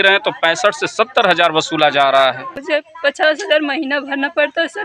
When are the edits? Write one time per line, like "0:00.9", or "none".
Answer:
0:02.6